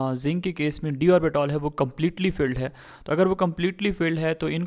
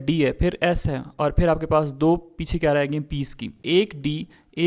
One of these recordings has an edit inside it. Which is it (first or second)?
second